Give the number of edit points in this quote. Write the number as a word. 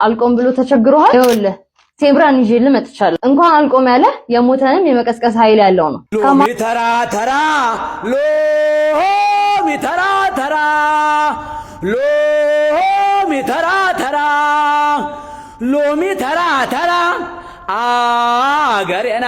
one